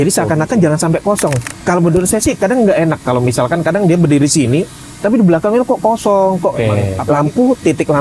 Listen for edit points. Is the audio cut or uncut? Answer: cut